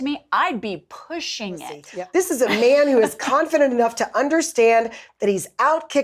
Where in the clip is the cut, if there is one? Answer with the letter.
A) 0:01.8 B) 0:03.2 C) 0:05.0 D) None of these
A